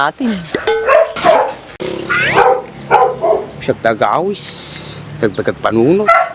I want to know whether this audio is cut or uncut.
cut